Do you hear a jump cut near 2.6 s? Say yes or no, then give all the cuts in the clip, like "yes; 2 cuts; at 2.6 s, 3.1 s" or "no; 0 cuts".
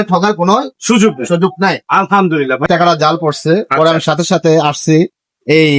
yes; 1 cut; at 2.6 s